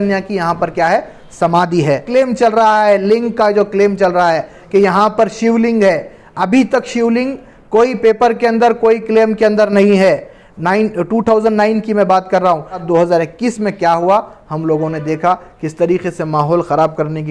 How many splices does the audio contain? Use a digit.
2